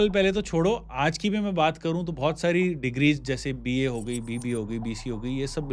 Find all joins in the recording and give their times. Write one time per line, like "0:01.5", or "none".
none